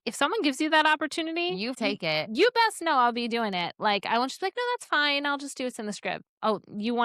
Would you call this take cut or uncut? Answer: cut